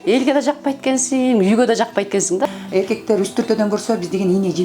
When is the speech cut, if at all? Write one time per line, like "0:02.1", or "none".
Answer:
0:02.5

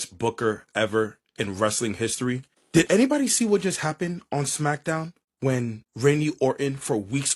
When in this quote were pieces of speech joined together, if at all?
none

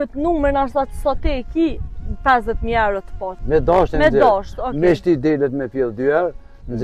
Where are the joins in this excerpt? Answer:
0:03.3

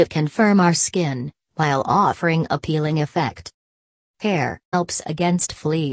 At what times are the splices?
none

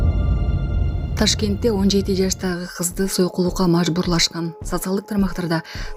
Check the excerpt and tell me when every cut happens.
none

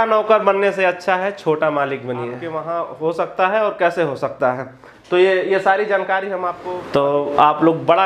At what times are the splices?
0:02.5
0:06.5

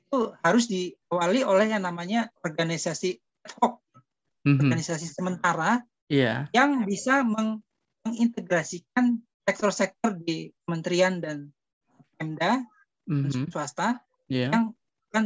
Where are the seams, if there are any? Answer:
0:02.3
0:09.3

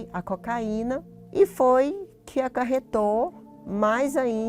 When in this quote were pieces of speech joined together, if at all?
0:01.2

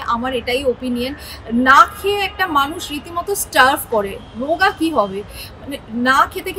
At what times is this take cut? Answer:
none

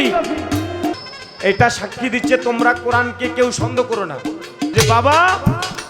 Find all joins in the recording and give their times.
0:00.9
0:04.7

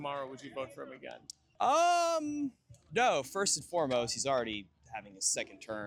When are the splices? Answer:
none

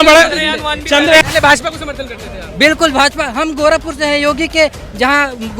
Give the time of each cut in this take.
0:01.2

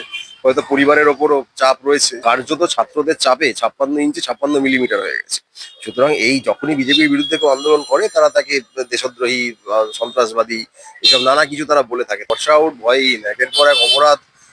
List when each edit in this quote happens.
0:02.1
0:12.2

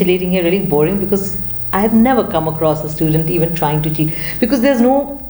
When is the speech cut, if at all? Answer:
none

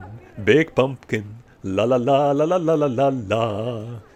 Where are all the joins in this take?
none

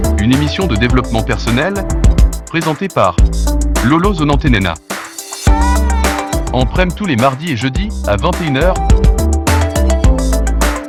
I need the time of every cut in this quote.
none

